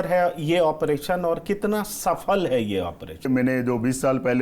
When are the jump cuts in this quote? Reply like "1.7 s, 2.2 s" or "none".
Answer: 3.3 s